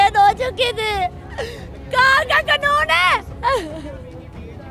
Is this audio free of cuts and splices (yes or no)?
yes